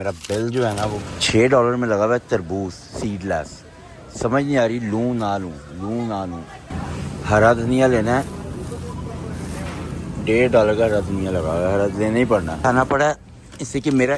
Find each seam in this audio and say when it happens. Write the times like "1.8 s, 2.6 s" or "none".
1.0 s, 6.6 s, 12.5 s